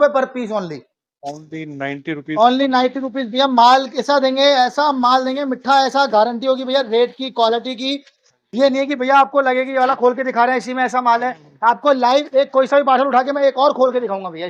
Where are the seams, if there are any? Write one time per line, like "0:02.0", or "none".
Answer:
none